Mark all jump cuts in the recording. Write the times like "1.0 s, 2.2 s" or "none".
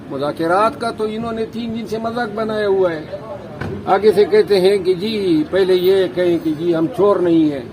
none